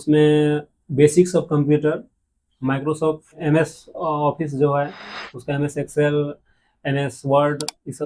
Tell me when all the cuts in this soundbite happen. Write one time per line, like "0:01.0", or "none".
0:03.4